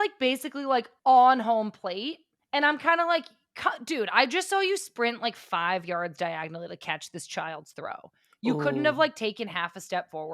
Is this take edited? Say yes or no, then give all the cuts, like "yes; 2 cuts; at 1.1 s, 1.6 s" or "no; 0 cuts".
yes; 2 cuts; at 0.9 s, 2.3 s